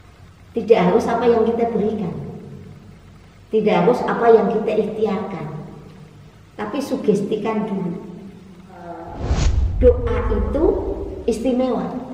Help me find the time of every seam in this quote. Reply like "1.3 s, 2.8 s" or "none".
9.1 s